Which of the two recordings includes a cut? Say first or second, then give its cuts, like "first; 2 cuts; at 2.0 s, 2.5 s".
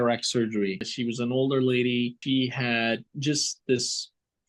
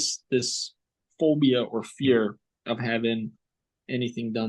first; 2 cuts; at 0.9 s, 2.2 s